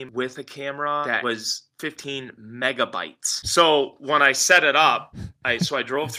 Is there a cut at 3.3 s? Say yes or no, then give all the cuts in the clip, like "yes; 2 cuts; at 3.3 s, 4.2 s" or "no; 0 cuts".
yes; 2 cuts; at 1.1 s, 3.3 s